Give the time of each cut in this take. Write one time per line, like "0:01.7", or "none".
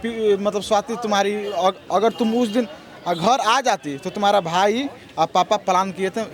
none